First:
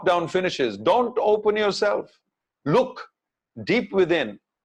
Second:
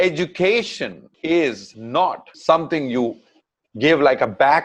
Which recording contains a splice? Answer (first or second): second